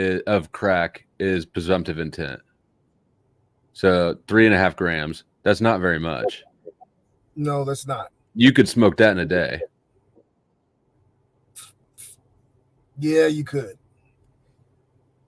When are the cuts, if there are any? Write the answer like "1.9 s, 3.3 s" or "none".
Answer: none